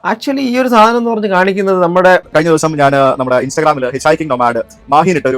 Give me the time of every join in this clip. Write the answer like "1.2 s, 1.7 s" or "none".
2.3 s